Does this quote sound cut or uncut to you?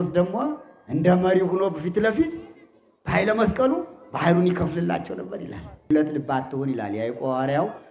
cut